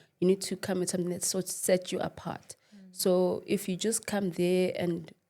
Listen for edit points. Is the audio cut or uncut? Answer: uncut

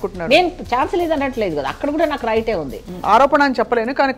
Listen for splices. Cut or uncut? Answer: cut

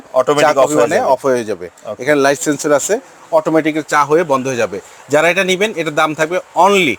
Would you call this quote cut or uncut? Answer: uncut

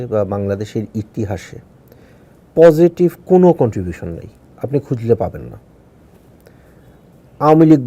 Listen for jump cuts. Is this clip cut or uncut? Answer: cut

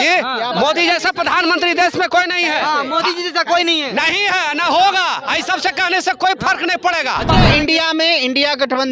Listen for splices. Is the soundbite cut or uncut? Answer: cut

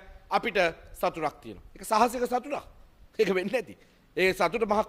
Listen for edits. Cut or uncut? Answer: uncut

